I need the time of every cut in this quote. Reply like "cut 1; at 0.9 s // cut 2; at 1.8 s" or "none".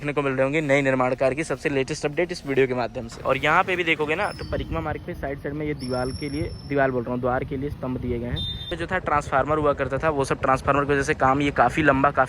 cut 1; at 3.2 s // cut 2; at 8.7 s